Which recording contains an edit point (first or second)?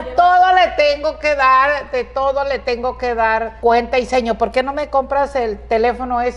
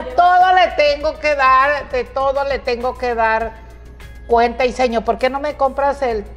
first